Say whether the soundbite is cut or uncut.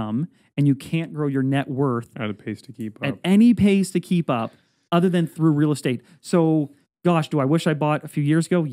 uncut